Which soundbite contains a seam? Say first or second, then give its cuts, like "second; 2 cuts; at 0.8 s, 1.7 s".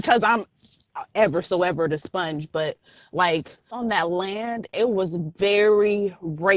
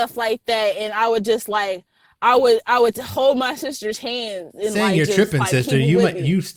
first; 2 cuts; at 3.7 s, 4.7 s